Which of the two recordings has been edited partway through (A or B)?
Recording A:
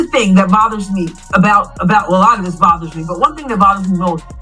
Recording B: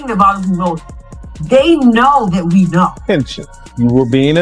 B